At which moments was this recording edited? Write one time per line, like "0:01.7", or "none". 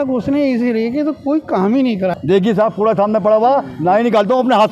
0:02.1